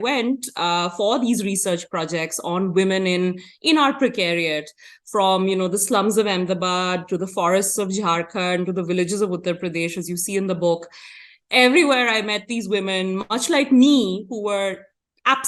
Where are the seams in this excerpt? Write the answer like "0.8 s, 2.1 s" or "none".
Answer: none